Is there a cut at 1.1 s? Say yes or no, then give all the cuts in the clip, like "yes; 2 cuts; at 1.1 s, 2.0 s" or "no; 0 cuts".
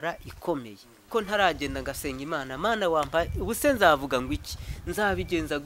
yes; 1 cut; at 1.1 s